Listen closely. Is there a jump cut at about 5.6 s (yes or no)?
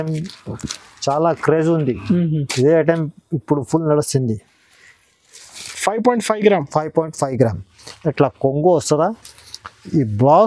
yes